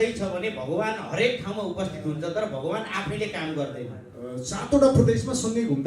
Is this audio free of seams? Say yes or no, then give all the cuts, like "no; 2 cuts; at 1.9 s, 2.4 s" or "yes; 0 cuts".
no; 1 cut; at 4.1 s